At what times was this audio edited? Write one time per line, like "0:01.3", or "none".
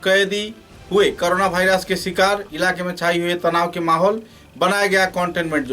none